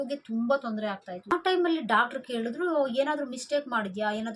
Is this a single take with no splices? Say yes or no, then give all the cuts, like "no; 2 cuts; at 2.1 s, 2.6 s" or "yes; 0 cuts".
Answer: no; 1 cut; at 1.3 s